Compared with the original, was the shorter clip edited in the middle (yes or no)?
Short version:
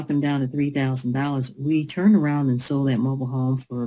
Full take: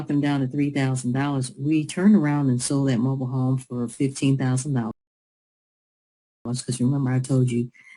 no